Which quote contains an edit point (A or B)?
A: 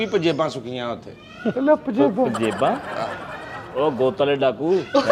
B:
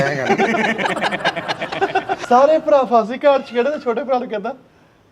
B